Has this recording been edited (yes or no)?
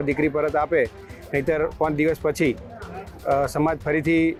no